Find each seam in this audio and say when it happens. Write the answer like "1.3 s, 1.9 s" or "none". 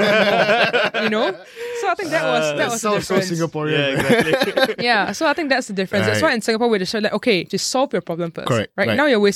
7.5 s